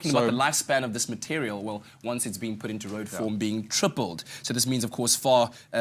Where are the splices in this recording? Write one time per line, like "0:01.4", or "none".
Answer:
none